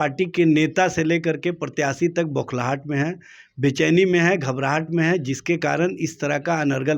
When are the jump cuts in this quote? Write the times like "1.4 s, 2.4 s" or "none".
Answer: none